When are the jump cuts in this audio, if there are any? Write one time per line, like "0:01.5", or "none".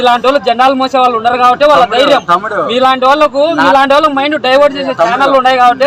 none

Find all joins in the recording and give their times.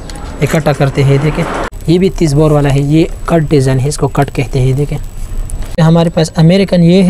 0:01.7
0:05.8

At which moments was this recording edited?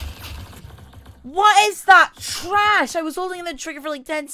none

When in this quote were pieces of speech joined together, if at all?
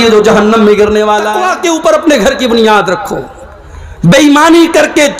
0:01.4

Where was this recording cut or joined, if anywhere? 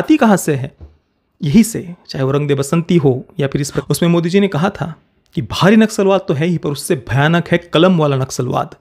0:03.7

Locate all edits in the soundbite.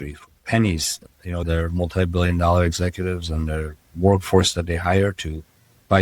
0:01.4

